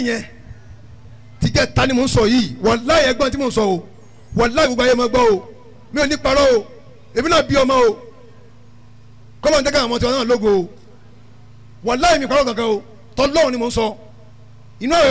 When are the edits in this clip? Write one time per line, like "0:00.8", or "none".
none